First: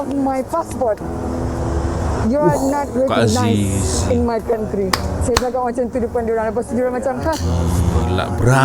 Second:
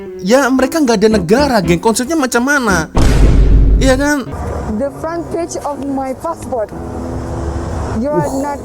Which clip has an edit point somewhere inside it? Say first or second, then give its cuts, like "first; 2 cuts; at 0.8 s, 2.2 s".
second; 1 cut; at 4.4 s